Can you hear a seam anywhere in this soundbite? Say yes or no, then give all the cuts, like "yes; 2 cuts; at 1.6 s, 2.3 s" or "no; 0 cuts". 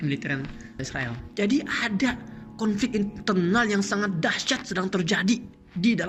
no; 0 cuts